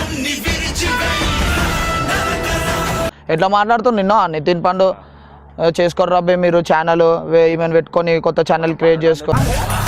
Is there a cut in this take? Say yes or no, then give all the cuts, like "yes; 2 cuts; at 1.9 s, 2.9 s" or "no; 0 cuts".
yes; 1 cut; at 3.2 s